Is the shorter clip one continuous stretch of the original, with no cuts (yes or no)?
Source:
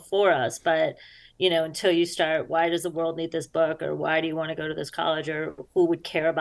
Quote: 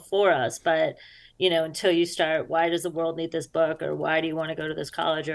yes